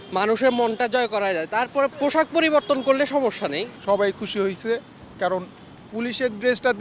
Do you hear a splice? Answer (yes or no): yes